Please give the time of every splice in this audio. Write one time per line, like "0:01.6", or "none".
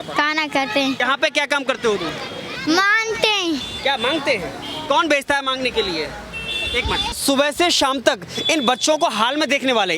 0:01.0
0:02.5
0:07.2